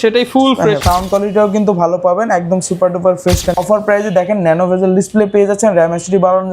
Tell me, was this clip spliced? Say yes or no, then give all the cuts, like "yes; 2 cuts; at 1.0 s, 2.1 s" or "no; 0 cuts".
yes; 2 cuts; at 0.8 s, 3.6 s